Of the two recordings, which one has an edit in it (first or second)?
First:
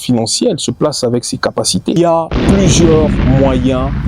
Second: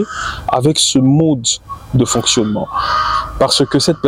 first